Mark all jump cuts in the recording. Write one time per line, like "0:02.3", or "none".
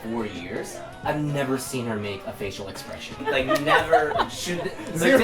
0:03.2